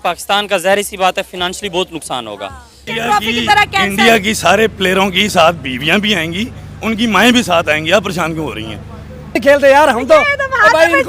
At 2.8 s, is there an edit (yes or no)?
yes